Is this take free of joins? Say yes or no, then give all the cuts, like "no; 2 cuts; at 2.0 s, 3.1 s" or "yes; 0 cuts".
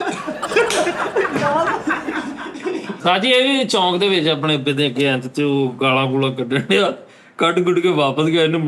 no; 1 cut; at 3.0 s